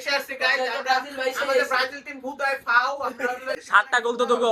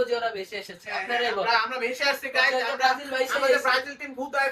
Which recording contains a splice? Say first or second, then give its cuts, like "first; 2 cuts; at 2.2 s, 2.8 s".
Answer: first; 1 cut; at 3.6 s